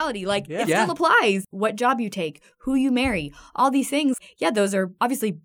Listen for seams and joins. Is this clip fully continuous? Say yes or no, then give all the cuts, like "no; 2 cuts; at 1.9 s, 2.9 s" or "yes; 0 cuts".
no; 2 cuts; at 1.5 s, 4.6 s